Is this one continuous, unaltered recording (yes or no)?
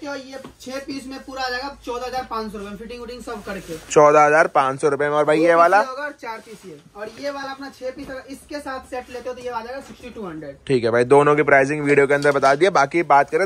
yes